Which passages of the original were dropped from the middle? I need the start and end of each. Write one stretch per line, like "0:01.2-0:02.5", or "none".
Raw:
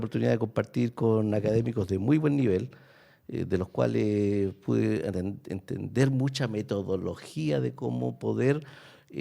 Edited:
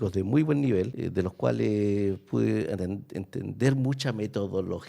0:02.7-0:03.3